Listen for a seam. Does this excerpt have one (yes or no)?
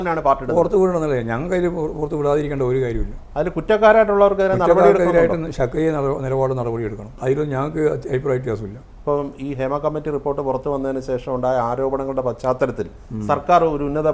no